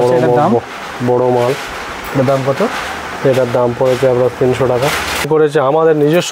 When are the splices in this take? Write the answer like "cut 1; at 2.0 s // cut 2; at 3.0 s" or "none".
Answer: cut 1; at 5.2 s